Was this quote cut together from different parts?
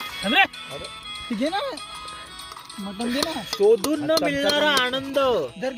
no; 0 cuts

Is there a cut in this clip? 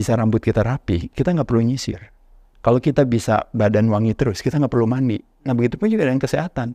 no; 0 cuts

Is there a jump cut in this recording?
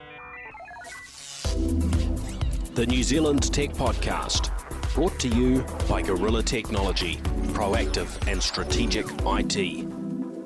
no; 0 cuts

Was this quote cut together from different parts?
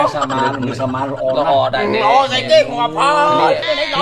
no; 0 cuts

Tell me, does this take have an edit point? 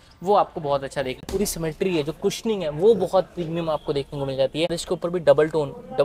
yes; 2 cuts; at 1.3 s, 4.8 s

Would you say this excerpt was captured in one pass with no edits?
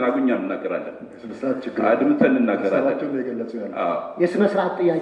yes; 0 cuts

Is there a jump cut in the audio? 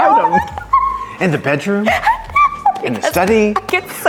no; 0 cuts

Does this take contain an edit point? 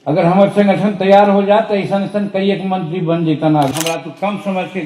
yes; 1 cut; at 3.7 s

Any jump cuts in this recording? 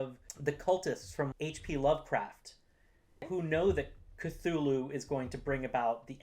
yes; 2 cuts; at 1.3 s, 3.2 s

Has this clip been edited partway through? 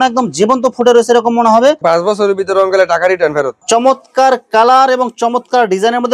yes; 2 cuts; at 1.8 s, 3.6 s

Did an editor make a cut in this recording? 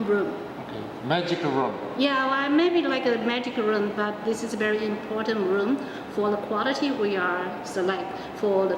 no; 0 cuts

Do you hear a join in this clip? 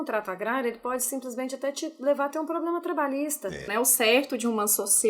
yes; 1 cut; at 3.6 s

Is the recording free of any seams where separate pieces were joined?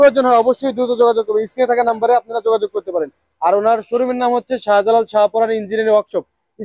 yes; 0 cuts

